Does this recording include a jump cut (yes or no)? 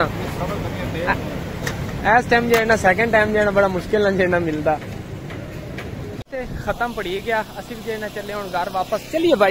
yes